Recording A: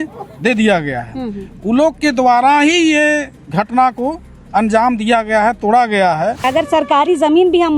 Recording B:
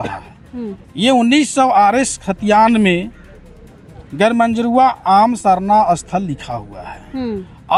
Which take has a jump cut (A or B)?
A